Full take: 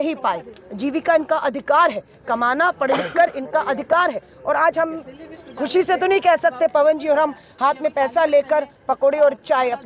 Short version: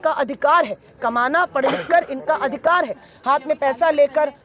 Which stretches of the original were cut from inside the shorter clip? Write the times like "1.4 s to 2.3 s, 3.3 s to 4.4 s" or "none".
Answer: 4.3 s to 7.4 s